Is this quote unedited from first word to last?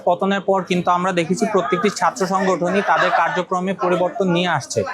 yes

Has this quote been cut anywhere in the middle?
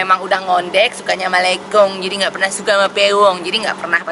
no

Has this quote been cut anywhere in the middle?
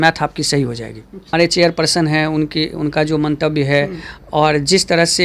yes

